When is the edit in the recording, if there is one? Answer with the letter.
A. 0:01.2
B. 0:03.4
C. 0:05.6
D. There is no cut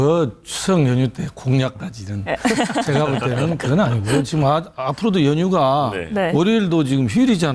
B